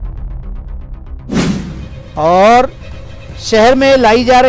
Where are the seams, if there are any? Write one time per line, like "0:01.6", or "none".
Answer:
0:01.8